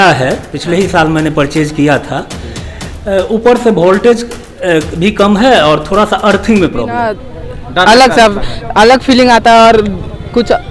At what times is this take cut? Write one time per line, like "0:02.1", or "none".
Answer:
0:07.0

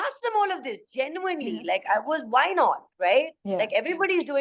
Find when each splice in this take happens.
none

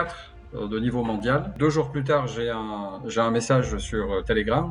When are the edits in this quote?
0:01.5

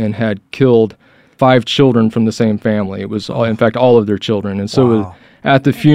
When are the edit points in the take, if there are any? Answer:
none

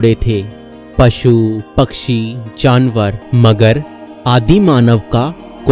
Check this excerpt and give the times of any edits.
0:03.2

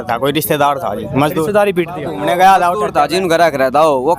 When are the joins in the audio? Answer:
0:02.1

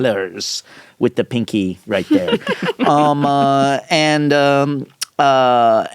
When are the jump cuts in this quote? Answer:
none

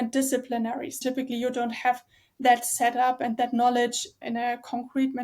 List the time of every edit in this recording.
0:00.9

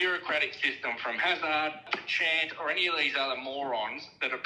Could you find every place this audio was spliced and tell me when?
0:02.0

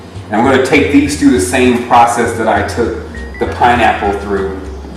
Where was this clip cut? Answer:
0:01.6

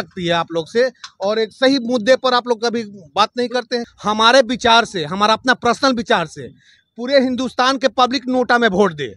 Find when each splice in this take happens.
0:03.9

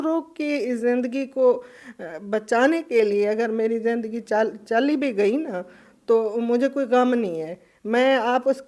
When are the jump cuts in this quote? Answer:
none

